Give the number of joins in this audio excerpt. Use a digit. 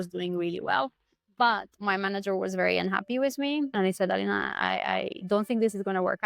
2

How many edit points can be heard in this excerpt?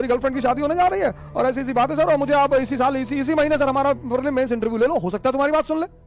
0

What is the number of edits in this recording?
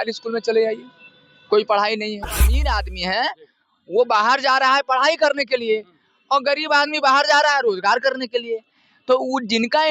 1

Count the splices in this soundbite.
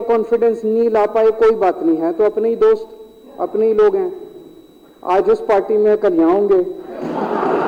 0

